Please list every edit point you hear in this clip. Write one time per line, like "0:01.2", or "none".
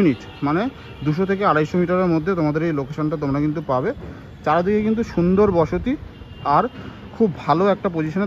none